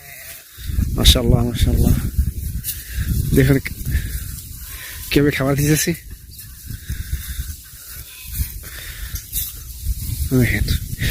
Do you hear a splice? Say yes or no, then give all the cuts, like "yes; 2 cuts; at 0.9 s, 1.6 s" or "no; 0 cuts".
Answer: no; 0 cuts